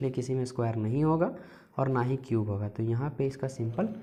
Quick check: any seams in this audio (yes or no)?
no